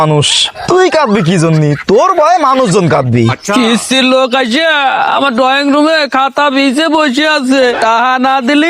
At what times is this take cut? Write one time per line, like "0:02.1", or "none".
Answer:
0:03.4

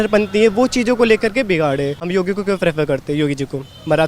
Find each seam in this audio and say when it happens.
0:02.0

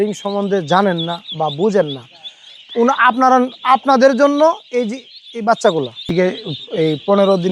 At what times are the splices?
0:06.0

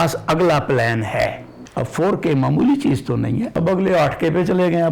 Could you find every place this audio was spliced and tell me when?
0:01.6
0:03.5

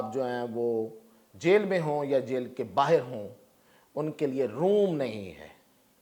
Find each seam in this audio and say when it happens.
none

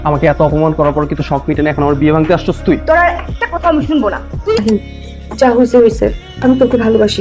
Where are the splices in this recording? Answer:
0:04.6

